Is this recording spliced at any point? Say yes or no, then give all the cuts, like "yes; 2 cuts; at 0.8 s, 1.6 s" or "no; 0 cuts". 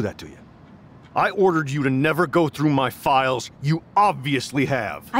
no; 0 cuts